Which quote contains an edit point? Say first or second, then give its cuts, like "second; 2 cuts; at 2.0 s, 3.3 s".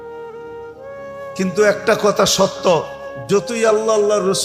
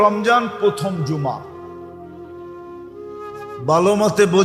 first; 1 cut; at 0.9 s